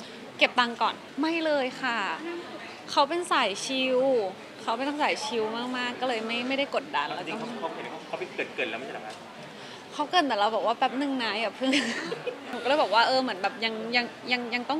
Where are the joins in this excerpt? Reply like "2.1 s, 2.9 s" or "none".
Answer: 1.0 s, 12.5 s

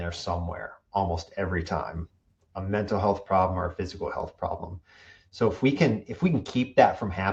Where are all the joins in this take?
none

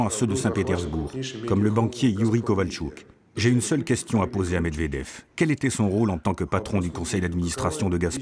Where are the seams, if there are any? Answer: none

